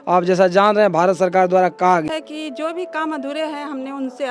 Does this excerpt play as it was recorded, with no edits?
no; 1 cut; at 2.1 s

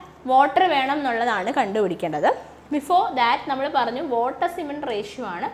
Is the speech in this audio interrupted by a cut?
no; 0 cuts

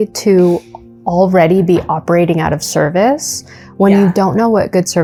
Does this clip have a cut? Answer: no; 0 cuts

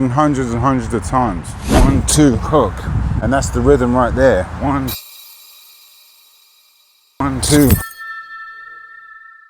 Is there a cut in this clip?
yes; 1 cut; at 1.5 s

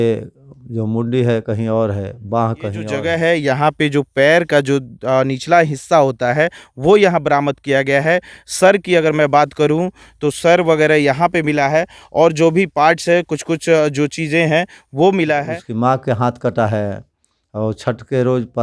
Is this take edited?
yes; 2 cuts; at 2.9 s, 15.6 s

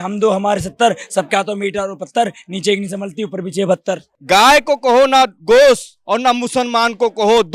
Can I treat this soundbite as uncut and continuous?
no; 1 cut; at 4.1 s

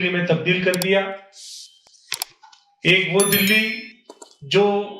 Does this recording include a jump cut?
no; 0 cuts

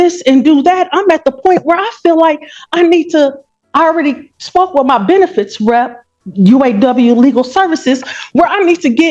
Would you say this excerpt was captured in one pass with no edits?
no; 1 cut; at 2.8 s

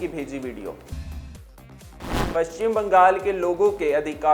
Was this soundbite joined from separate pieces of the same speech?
no; 0 cuts

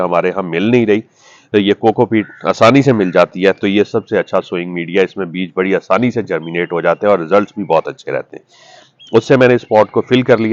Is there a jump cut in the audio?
no; 0 cuts

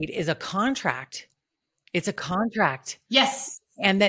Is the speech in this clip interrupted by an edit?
no; 0 cuts

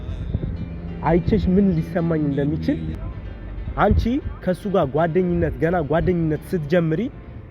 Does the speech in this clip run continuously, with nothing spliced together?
no; 1 cut; at 3.0 s

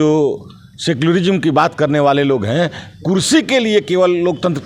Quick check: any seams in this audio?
no; 0 cuts

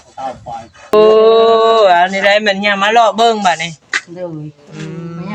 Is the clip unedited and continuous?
no; 1 cut; at 0.9 s

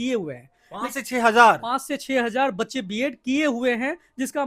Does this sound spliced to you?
no; 0 cuts

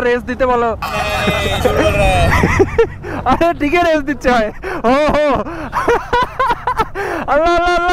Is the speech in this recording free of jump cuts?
yes; 0 cuts

